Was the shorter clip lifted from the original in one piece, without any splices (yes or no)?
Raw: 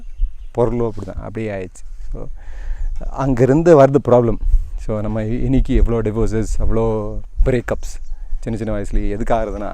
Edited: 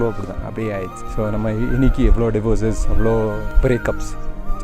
no